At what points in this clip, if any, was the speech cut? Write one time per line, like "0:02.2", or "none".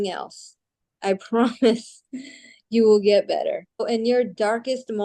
0:03.8